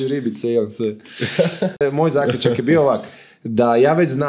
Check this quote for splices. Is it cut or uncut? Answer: cut